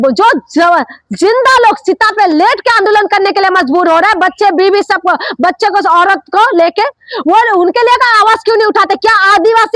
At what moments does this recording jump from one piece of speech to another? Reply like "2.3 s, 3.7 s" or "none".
none